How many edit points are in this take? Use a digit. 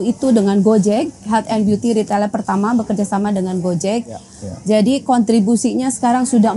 1